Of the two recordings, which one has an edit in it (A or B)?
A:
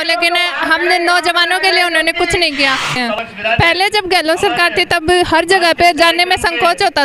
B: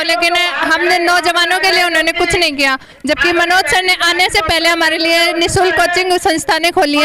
A